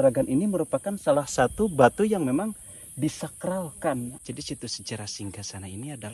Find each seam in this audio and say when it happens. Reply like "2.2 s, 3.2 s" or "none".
4.1 s